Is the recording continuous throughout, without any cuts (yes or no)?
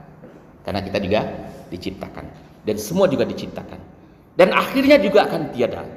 yes